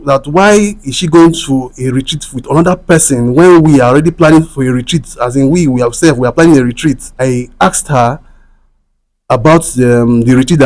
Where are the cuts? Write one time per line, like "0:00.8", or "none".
0:07.1